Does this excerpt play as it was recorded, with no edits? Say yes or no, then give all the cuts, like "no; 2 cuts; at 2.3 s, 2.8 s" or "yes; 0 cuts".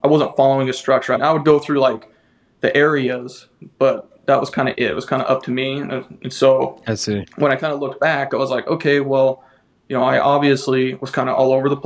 no; 1 cut; at 1.2 s